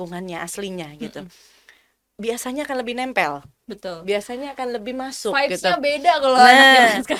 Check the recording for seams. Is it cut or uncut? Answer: uncut